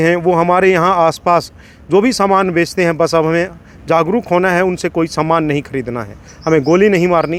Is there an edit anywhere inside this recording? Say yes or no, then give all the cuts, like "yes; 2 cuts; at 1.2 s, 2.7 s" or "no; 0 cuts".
no; 0 cuts